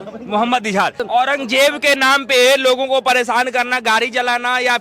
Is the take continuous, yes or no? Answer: no